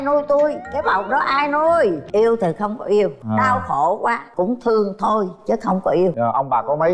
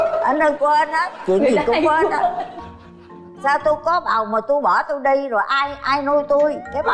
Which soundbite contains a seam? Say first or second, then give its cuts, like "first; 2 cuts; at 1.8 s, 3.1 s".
first; 4 cuts; at 2.0 s, 3.2 s, 4.3 s, 6.2 s